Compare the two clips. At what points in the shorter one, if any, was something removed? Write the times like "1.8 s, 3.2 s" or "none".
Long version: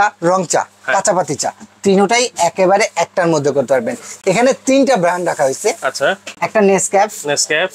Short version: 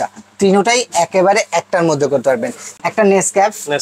2.7 s